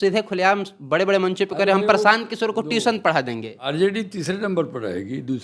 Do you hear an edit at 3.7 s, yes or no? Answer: yes